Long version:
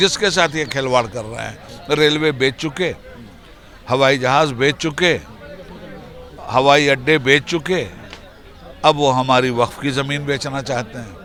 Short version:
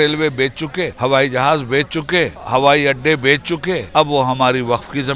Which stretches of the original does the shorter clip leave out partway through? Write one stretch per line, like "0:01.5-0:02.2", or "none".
0:03.0-0:03.8
0:05.3-0:06.4
0:07.9-0:08.7